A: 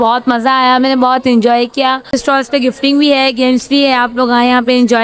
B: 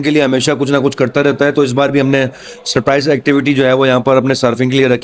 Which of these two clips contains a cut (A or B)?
A